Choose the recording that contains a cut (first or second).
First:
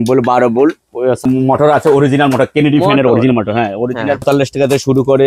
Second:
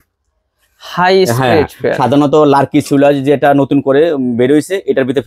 first